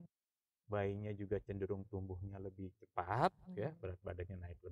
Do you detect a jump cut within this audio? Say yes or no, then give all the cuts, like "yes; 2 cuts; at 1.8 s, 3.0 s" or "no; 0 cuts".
no; 0 cuts